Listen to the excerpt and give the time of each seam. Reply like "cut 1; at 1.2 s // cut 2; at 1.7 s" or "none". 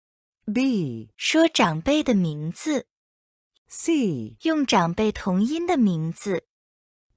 none